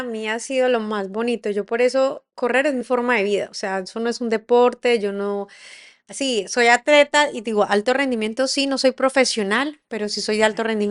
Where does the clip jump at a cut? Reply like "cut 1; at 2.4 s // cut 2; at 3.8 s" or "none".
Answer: none